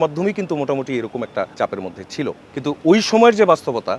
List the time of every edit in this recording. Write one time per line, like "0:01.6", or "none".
0:01.5
0:02.5